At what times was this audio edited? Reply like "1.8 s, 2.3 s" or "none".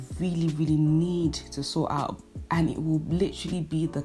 none